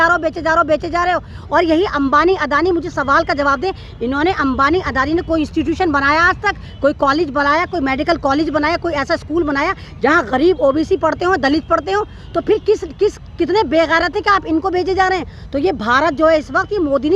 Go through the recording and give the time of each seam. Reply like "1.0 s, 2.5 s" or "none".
none